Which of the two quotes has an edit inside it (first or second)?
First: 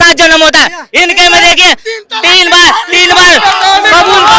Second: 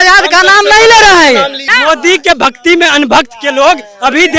second